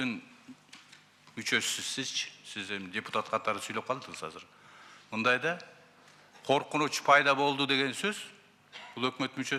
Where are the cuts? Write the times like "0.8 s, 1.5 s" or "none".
none